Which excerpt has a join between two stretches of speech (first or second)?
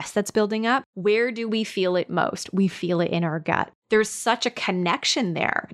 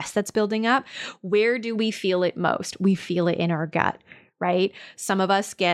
first